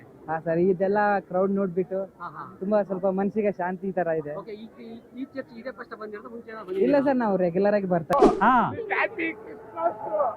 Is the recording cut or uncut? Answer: cut